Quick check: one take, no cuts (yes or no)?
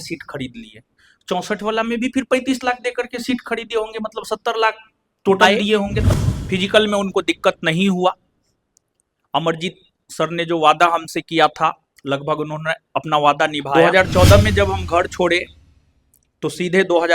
no